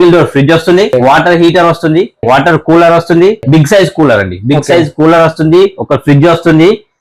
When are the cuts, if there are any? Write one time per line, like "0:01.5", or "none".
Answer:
0:00.9
0:02.2
0:03.4